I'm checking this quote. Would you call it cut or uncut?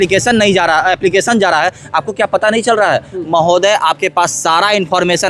uncut